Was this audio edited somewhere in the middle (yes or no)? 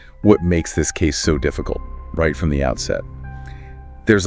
no